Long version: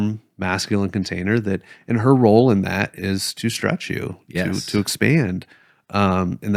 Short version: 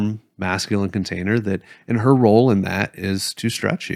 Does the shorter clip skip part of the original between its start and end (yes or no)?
no